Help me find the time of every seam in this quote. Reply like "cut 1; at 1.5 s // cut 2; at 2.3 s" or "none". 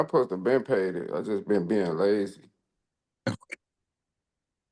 none